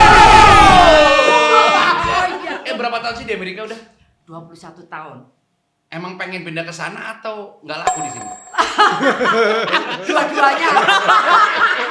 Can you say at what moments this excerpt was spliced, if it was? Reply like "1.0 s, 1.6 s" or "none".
2.4 s